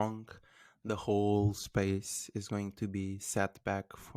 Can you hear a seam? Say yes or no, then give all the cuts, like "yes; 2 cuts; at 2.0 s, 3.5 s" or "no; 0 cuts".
no; 0 cuts